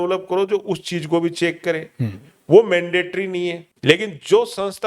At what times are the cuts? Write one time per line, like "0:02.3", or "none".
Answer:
0:03.7